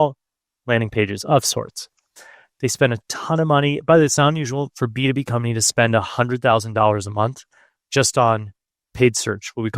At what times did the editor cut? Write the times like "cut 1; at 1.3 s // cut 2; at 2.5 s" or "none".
none